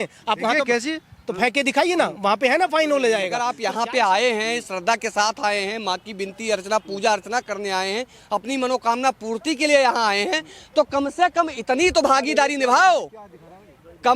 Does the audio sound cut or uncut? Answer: cut